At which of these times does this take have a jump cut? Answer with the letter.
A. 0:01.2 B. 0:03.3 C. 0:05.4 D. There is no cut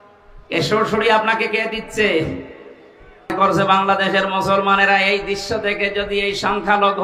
B